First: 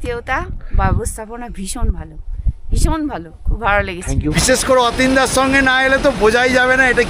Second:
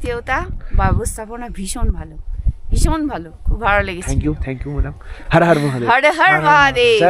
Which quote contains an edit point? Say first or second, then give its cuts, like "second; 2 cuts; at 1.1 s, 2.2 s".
first; 1 cut; at 4.4 s